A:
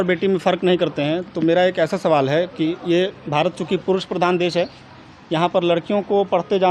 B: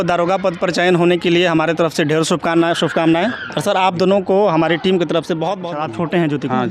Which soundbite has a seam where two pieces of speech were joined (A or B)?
B